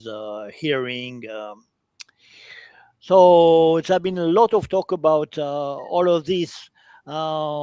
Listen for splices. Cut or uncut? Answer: uncut